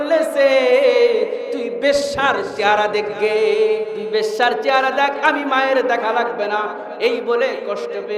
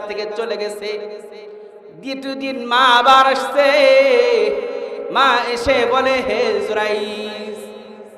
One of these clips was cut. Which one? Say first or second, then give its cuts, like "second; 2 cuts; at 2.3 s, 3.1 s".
first; 1 cut; at 4.0 s